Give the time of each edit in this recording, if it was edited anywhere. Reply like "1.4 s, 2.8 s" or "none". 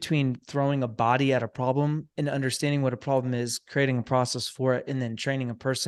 none

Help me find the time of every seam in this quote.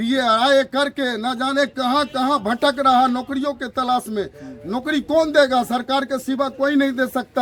none

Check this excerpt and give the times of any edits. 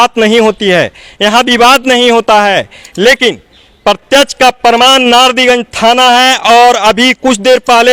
none

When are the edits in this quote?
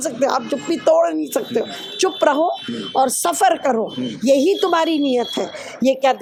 none

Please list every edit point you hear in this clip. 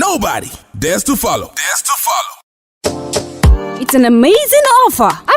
2.3 s

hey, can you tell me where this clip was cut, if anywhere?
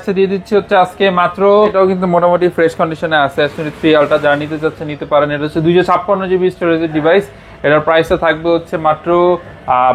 1.7 s

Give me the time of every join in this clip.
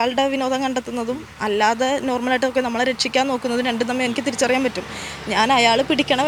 none

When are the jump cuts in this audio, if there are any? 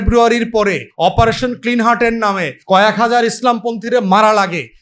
0.9 s, 2.5 s

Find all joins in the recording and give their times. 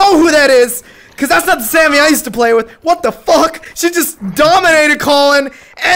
none

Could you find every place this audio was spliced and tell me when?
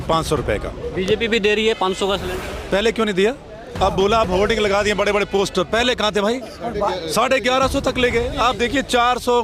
none

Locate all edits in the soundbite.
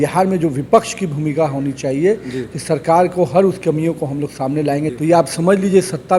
4.9 s

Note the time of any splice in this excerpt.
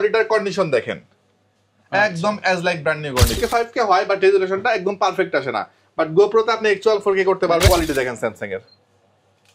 3.4 s, 7.7 s

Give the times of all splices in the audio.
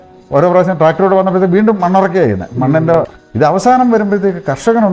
3.0 s

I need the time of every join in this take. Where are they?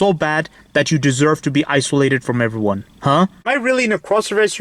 3.5 s

